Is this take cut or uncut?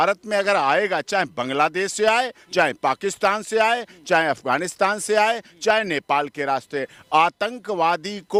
uncut